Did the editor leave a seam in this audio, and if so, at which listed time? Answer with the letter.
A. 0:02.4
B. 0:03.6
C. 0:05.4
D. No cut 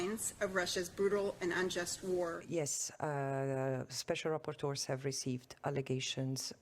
A